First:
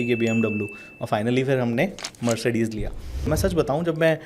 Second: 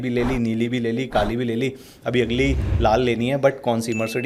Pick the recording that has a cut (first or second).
first